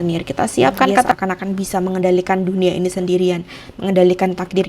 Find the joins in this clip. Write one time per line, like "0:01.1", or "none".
0:01.1